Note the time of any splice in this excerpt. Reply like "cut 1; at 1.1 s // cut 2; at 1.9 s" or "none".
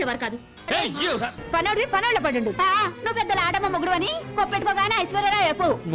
cut 1; at 1.4 s